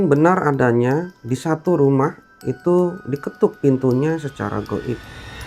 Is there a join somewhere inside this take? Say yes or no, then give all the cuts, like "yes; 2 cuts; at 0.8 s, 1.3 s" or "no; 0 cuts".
no; 0 cuts